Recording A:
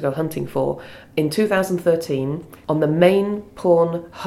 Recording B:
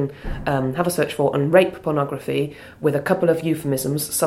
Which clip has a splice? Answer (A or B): A